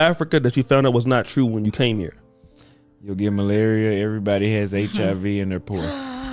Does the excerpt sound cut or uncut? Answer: uncut